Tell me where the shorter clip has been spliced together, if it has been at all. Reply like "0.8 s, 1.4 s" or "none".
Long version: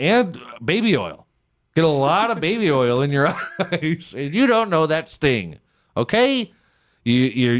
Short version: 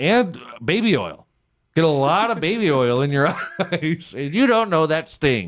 none